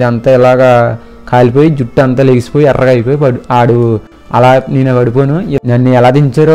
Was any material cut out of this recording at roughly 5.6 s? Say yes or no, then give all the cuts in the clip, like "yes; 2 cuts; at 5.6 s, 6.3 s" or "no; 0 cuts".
yes; 1 cut; at 5.6 s